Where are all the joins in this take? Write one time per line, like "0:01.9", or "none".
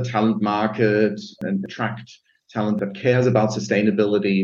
0:01.4
0:02.8